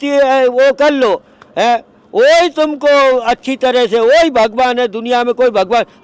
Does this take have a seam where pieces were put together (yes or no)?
no